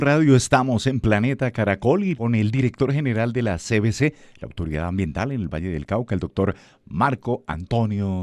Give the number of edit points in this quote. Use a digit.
1